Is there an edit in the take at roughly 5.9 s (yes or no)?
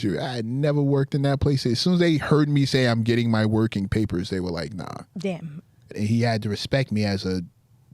yes